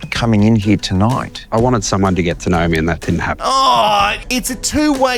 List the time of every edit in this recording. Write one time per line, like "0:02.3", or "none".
0:04.2

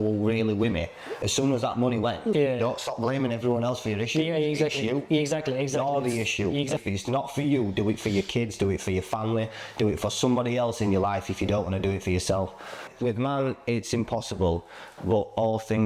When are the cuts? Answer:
0:02.3
0:06.8
0:12.9

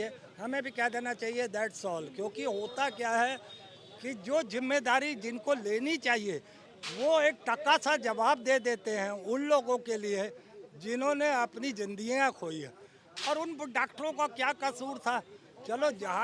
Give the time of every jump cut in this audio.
none

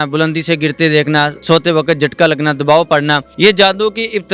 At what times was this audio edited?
0:01.4
0:03.3

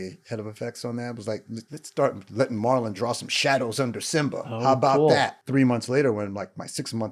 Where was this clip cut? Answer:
0:01.8
0:05.4

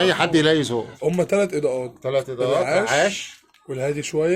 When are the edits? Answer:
0:00.9

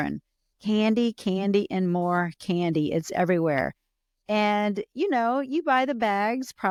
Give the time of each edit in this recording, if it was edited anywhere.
none

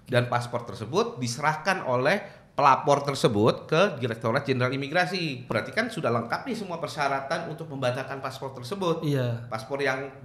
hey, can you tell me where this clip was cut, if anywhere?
0:05.5
0:06.8

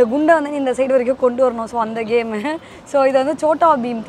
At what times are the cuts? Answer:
none

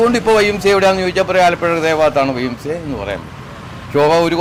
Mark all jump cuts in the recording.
none

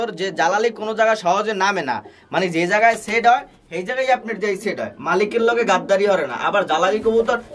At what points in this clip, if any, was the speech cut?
none

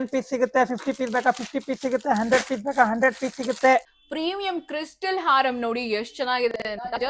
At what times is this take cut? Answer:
0:04.0

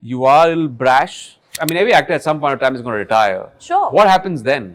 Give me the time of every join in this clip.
0:01.5

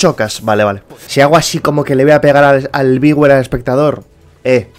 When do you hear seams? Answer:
0:00.9

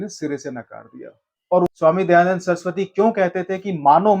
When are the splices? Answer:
0:01.7

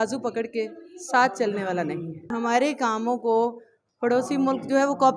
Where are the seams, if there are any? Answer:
0:02.3

